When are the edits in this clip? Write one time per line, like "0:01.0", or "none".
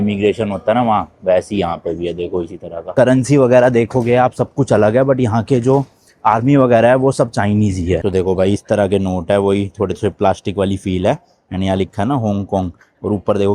0:02.8
0:08.1